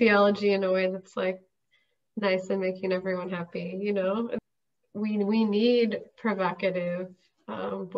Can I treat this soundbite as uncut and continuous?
yes; 0 cuts

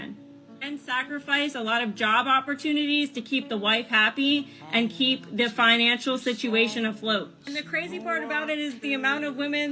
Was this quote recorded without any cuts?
no; 1 cut; at 2.3 s

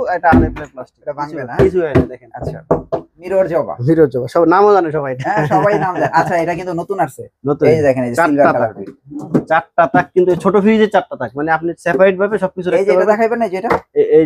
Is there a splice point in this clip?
yes; 1 cut; at 3.1 s

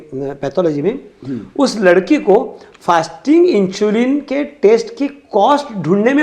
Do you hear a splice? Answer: no; 0 cuts

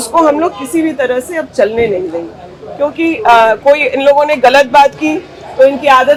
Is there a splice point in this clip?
no; 0 cuts

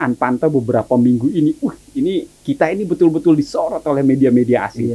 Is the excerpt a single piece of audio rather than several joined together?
yes; 0 cuts

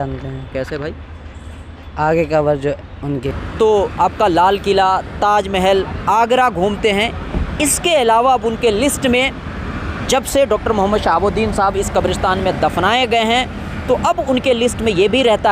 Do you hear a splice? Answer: yes; 1 cut; at 3.2 s

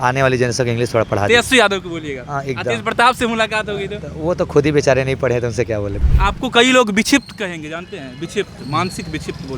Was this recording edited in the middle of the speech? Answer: yes; 1 cut; at 6.0 s

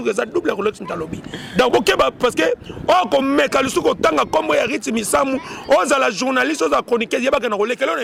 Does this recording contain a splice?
no; 0 cuts

